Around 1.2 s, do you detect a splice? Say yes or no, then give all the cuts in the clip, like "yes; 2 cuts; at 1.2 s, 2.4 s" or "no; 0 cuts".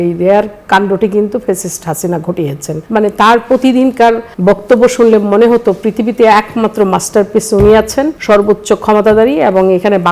no; 3 cuts; at 2.7 s, 4.3 s, 8.2 s